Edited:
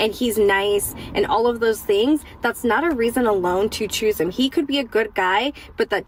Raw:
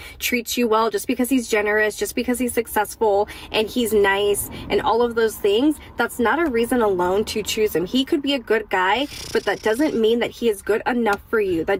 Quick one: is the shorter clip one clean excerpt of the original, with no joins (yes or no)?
yes